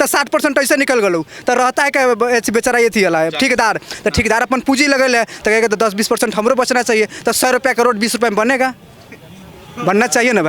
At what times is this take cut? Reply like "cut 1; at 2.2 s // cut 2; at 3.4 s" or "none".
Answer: none

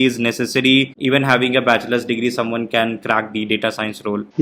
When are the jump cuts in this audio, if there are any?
none

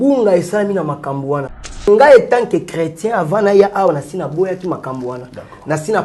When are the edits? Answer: cut 1; at 1.9 s

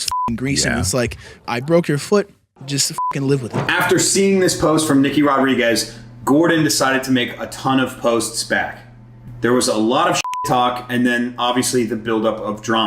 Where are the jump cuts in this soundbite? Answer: cut 1; at 3.6 s

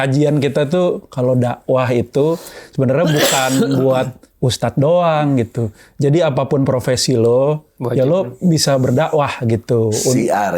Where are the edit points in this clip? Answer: none

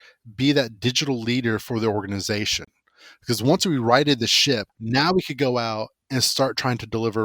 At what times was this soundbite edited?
cut 1; at 4.7 s

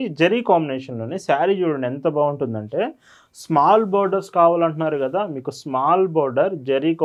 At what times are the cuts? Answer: none

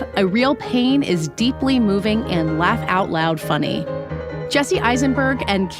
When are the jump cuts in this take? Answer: none

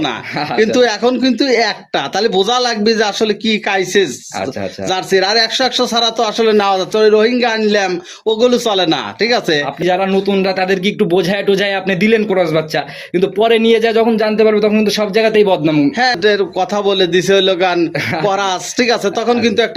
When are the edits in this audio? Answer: cut 1; at 16.2 s

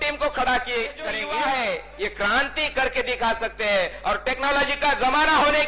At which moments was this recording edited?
cut 1; at 1.1 s

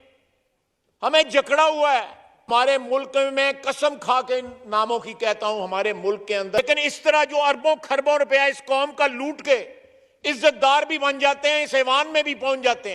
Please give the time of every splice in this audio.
cut 1; at 2.5 s // cut 2; at 6.6 s

